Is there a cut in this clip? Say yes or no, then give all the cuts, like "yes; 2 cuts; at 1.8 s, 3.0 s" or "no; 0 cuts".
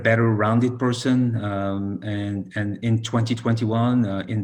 no; 0 cuts